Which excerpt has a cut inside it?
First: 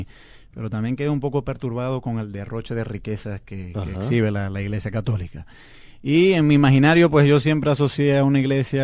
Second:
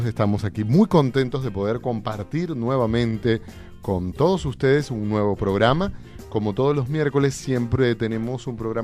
second; 1 cut; at 4.9 s

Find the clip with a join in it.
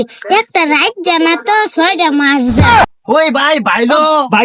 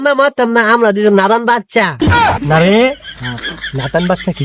first; 1 cut; at 2.9 s

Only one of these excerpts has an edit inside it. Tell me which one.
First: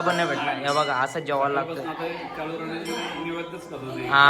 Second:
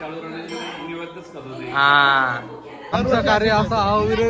second; 1 cut; at 2.8 s

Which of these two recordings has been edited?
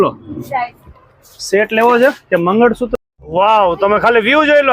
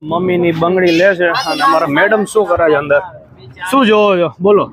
first; 1 cut; at 2.9 s

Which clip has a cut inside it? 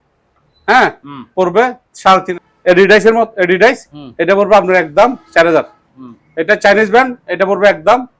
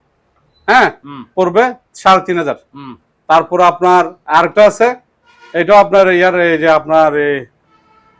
first; 1 cut; at 2.3 s

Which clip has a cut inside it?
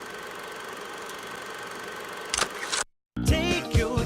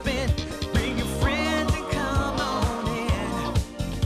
first; 1 cut; at 2.9 s

